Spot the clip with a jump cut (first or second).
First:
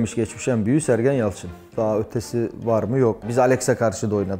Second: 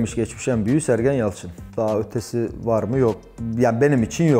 first